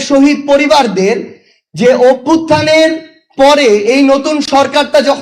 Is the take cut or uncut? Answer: uncut